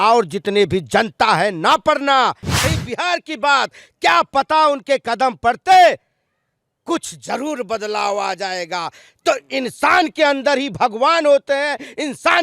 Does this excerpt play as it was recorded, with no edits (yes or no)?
no